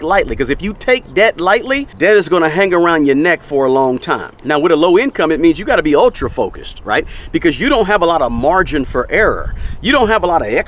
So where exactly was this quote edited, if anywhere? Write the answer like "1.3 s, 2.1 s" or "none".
1.9 s, 4.3 s